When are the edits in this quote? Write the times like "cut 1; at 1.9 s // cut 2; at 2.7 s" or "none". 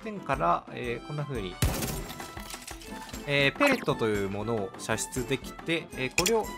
none